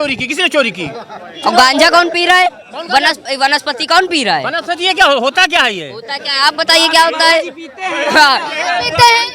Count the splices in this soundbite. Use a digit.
0